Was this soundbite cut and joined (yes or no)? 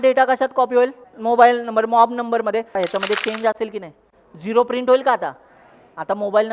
yes